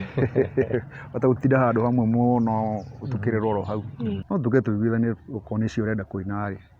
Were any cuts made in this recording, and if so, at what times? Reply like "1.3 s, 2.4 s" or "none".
4.2 s